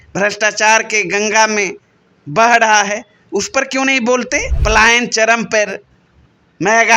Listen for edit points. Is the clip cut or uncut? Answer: cut